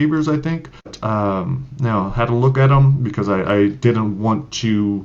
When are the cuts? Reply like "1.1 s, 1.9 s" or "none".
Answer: 1.0 s